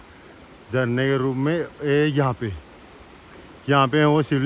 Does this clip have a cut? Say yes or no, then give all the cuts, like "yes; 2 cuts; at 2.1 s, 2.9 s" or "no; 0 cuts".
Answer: no; 0 cuts